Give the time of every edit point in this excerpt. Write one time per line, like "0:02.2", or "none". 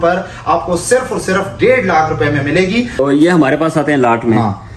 0:03.0